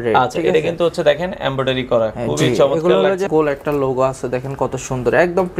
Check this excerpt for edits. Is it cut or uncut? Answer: cut